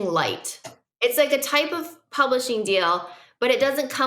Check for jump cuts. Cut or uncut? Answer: cut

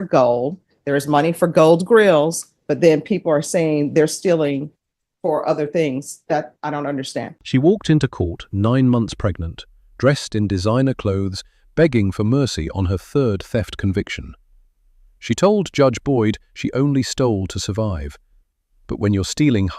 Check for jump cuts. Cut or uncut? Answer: cut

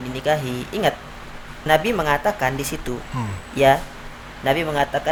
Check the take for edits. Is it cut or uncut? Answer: uncut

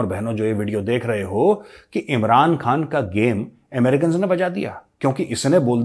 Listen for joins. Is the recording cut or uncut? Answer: uncut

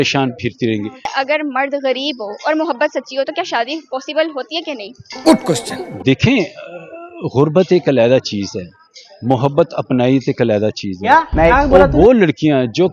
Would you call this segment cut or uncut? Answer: uncut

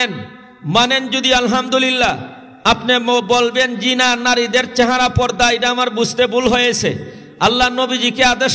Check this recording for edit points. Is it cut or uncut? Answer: uncut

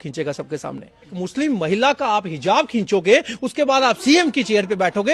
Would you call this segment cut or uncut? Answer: cut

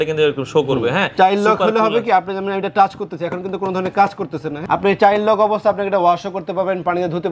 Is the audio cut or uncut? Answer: cut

